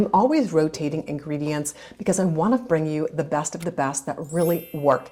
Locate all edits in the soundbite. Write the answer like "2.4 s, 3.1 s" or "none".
none